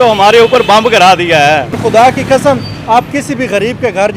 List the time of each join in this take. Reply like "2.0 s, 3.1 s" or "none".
1.7 s